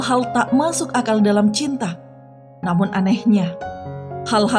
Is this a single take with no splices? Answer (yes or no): yes